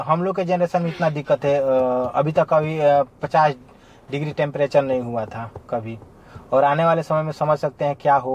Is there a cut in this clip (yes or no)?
no